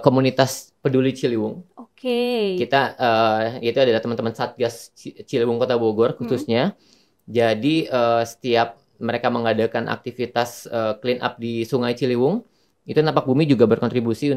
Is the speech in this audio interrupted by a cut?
no; 0 cuts

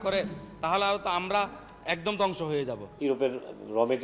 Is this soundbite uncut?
no; 1 cut; at 2.8 s

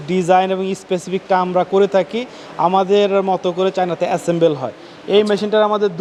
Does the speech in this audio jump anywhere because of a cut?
no; 0 cuts

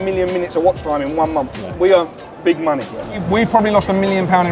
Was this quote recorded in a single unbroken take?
no; 2 cuts; at 1.7 s, 3.2 s

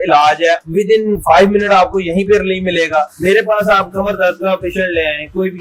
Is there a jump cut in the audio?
yes; 2 cuts; at 0.9 s, 3.1 s

